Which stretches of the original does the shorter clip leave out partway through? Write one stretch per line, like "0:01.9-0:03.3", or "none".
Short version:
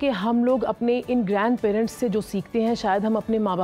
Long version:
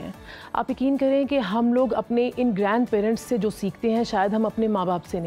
none